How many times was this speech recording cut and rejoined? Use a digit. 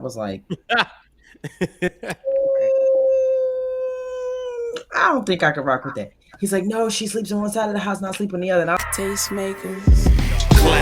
1